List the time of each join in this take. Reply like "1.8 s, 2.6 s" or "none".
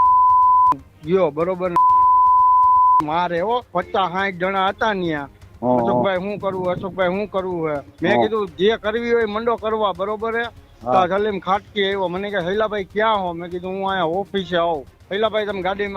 3.7 s, 7.9 s, 15.0 s

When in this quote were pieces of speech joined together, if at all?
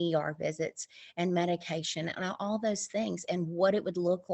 none

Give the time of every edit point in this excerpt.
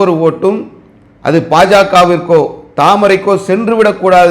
none

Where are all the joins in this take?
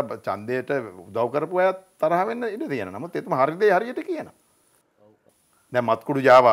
none

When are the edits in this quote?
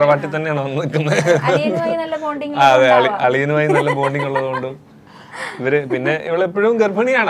none

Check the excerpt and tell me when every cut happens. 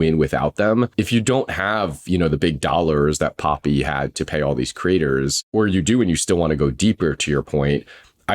0.9 s, 5.4 s

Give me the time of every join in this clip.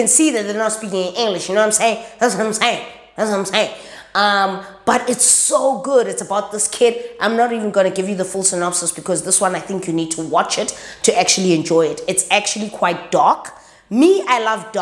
none

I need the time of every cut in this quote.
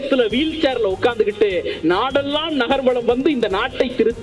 none

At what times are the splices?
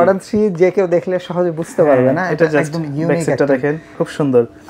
none

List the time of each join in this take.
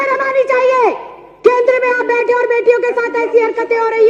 none

